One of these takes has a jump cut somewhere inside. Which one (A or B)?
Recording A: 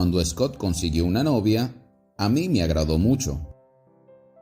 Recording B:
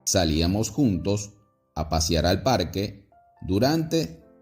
A